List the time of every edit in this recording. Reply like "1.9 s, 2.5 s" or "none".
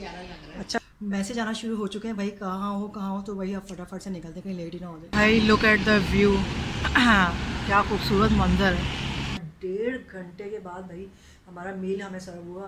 0.8 s, 5.1 s, 9.4 s